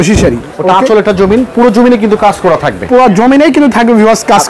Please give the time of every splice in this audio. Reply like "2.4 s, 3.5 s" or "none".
none